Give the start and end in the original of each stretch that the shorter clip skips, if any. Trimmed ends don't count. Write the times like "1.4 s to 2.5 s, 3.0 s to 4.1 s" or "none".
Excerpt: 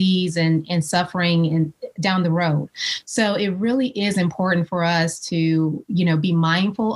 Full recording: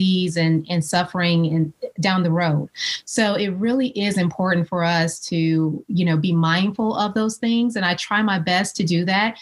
none